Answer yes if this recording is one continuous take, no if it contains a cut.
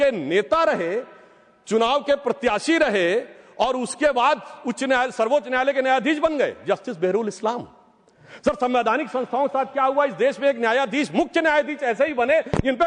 yes